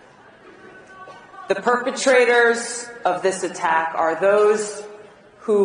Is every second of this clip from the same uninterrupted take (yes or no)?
no